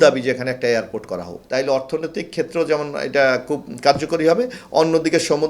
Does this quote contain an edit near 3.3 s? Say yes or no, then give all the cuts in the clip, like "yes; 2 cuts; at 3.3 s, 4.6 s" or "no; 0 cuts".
no; 1 cut; at 1.3 s